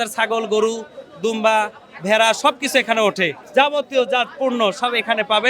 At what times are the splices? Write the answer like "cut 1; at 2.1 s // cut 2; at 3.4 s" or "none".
cut 1; at 3.4 s